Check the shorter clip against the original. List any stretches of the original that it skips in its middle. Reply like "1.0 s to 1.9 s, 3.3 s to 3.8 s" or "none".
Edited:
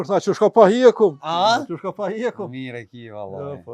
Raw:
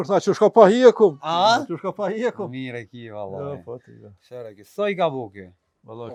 none